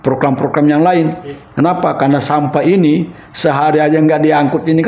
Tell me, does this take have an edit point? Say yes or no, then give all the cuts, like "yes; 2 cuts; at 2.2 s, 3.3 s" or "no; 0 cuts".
no; 0 cuts